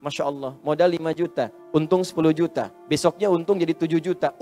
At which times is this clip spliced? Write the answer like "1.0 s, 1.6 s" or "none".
1.6 s, 2.7 s